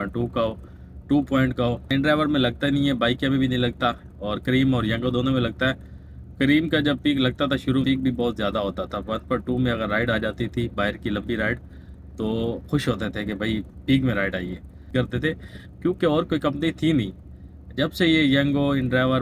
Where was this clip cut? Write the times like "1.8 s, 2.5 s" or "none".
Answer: 1.9 s, 7.8 s, 14.9 s